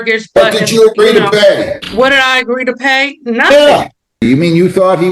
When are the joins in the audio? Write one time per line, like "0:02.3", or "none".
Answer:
0:01.8
0:04.3